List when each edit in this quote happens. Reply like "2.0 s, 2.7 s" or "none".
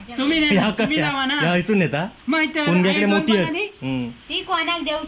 none